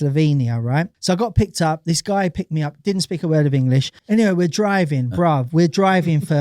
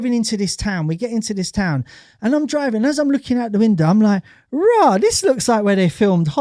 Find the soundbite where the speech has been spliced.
first; 2 cuts; at 0.9 s, 3.9 s

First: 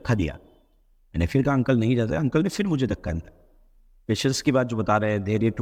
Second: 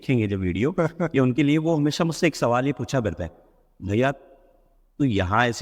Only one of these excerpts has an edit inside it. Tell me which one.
second; 1 cut; at 1.3 s

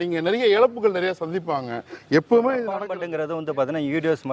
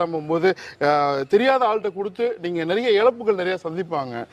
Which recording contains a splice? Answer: first; 1 cut; at 2.9 s

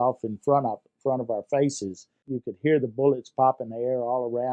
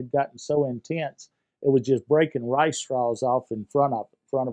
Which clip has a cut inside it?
first; 1 cut; at 2.2 s

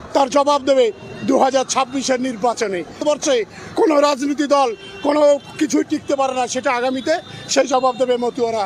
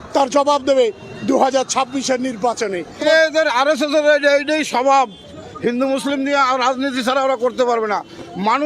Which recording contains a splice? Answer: second; 1 cut; at 3.1 s

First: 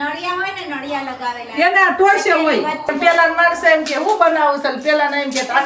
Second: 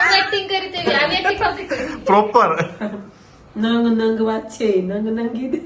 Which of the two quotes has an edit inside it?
first; 1 cut; at 2.9 s

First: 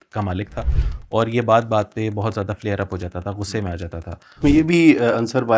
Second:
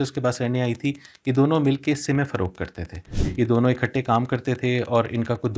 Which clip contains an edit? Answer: first; 1 cut; at 4.4 s

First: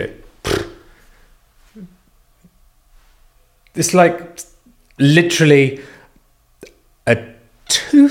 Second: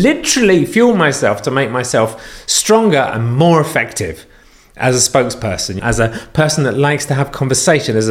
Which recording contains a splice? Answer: second; 1 cut; at 5.8 s

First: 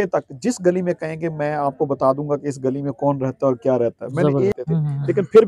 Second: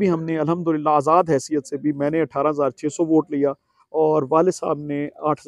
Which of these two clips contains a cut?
first; 1 cut; at 4.5 s

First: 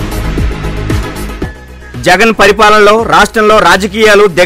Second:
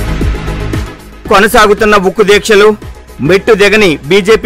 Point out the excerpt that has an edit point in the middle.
second; 1 cut; at 1.0 s

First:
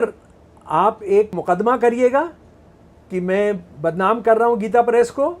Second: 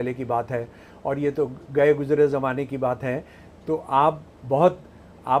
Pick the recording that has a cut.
first; 1 cut; at 1.4 s

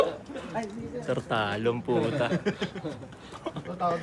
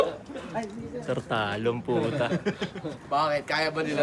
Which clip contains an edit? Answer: second; 1 cut; at 2.9 s

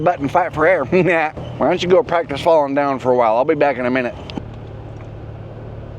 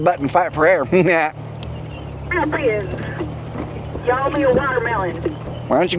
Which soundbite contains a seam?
first; 2 cuts; at 1.4 s, 4.4 s

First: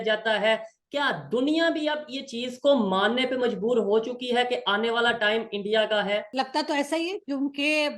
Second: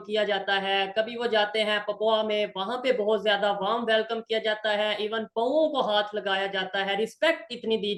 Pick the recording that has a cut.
first; 1 cut; at 6.3 s

